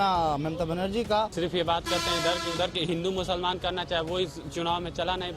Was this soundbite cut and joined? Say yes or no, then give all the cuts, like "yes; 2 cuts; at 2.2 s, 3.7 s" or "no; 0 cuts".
yes; 1 cut; at 1.3 s